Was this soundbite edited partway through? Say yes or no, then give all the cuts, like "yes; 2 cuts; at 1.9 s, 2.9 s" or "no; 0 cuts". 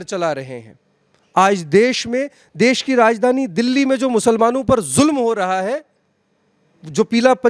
no; 0 cuts